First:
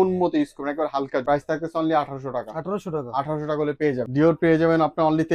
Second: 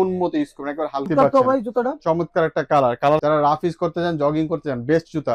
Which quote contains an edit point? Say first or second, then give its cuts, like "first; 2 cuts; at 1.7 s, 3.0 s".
second; 2 cuts; at 1.1 s, 3.2 s